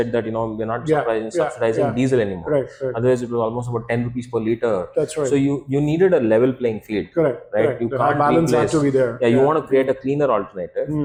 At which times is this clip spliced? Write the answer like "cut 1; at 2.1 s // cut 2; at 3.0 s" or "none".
none